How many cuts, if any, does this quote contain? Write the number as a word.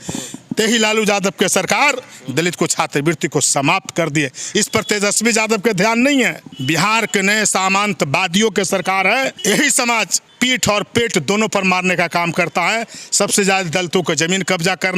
three